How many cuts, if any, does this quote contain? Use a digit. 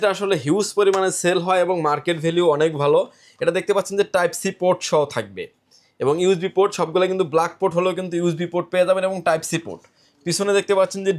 0